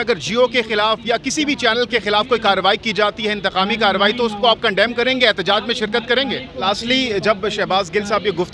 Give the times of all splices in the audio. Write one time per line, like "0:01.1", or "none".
0:06.6